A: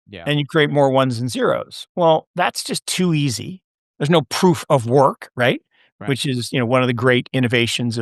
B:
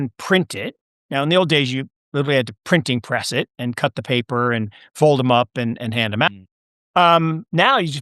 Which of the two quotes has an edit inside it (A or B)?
B